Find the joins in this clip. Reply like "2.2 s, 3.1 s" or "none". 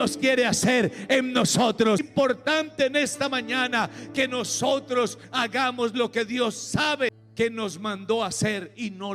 2.1 s, 7.2 s